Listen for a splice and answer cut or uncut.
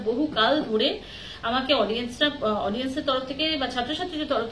uncut